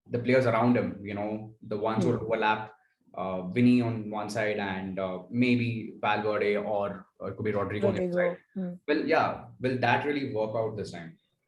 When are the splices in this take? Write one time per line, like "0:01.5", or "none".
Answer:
none